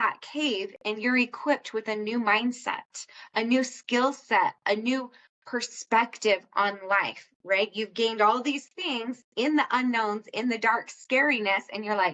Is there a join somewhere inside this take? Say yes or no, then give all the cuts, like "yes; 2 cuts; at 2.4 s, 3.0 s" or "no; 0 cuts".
no; 0 cuts